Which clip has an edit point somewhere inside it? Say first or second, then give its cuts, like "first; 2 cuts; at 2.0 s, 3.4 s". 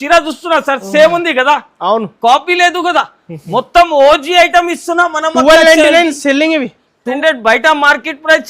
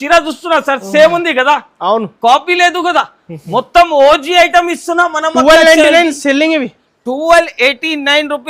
first; 1 cut; at 7.2 s